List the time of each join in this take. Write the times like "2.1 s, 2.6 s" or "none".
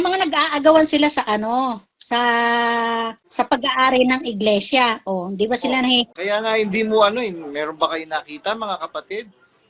none